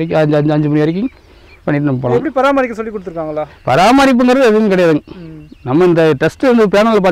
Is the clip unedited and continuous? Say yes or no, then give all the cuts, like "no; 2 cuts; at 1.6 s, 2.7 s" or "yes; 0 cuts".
yes; 0 cuts